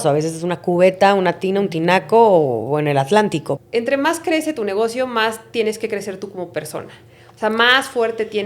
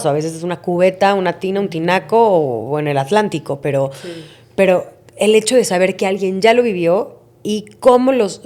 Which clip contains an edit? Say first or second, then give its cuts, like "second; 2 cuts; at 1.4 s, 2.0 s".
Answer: first; 1 cut; at 3.5 s